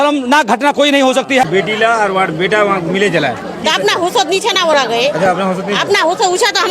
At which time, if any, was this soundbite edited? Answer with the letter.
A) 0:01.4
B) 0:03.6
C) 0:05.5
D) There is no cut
A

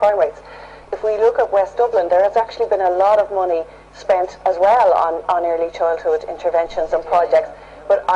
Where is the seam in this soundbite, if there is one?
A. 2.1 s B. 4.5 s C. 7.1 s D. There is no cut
B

